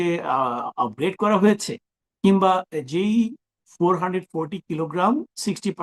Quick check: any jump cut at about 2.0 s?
no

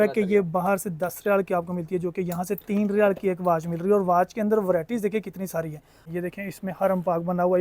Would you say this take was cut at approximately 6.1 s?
yes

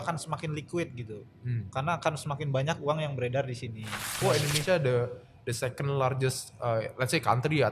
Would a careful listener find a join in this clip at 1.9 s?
no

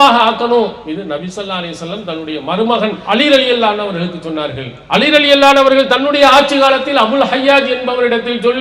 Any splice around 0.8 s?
yes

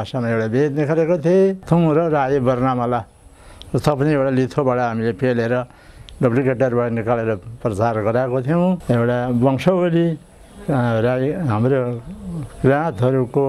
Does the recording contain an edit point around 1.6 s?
yes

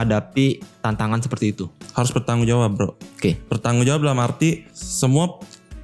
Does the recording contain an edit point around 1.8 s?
yes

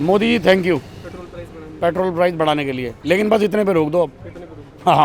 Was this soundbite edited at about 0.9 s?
no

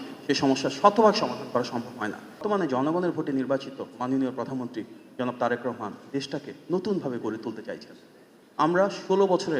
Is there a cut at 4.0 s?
no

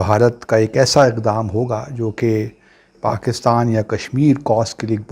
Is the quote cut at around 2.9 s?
yes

